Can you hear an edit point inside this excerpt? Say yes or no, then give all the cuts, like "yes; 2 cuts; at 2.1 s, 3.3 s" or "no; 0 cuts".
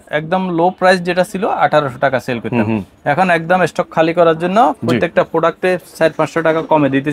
no; 0 cuts